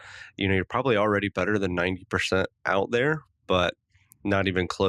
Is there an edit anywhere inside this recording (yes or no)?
no